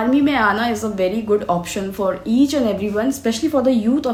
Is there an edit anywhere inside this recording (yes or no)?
no